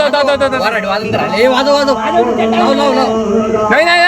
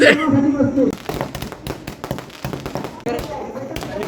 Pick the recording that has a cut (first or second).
second